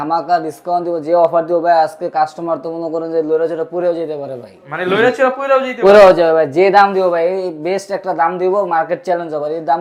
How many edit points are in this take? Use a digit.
0